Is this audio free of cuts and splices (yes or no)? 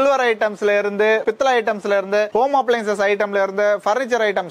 yes